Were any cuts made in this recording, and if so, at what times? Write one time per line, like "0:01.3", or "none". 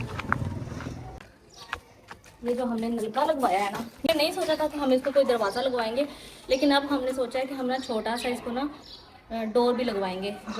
0:01.2
0:04.1